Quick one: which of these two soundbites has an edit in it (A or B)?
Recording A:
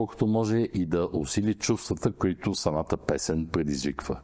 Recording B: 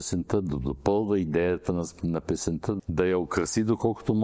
B